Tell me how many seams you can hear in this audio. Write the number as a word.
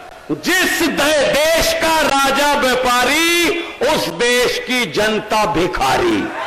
zero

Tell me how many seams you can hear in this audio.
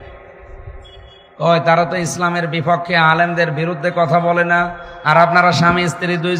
zero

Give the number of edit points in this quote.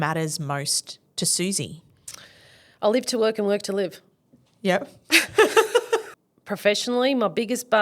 one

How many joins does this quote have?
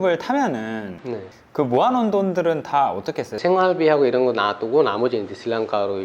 one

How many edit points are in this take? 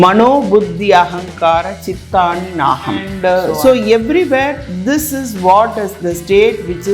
one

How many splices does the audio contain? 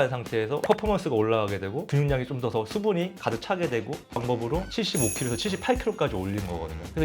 one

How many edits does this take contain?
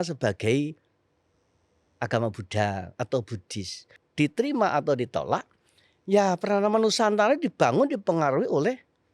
one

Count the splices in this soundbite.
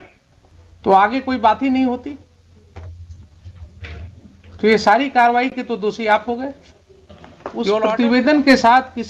one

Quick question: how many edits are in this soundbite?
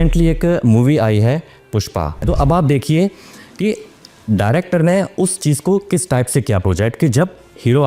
one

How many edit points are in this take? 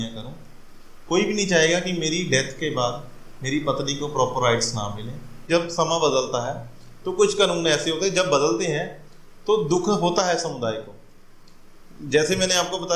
one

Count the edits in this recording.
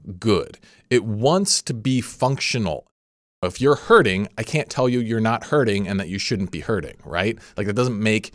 one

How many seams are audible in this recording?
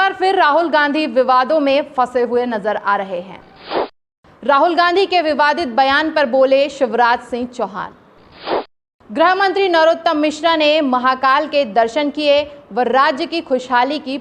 two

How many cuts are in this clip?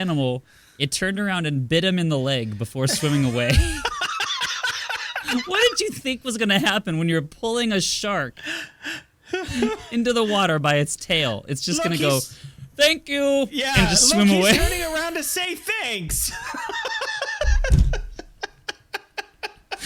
zero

